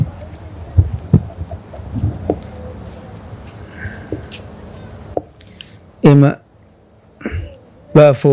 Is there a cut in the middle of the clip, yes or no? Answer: no